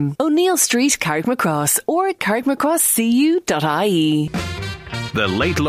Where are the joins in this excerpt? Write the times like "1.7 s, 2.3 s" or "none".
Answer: 4.3 s